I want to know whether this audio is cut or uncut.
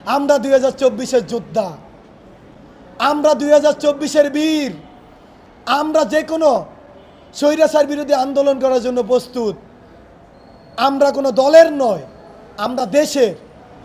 uncut